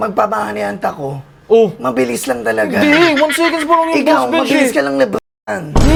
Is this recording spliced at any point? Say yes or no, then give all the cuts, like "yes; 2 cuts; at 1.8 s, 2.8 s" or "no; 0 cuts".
no; 0 cuts